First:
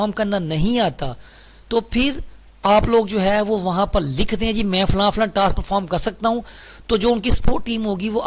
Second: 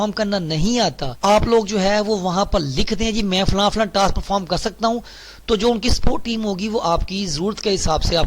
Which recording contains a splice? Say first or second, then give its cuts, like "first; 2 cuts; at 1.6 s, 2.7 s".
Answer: second; 1 cut; at 1.1 s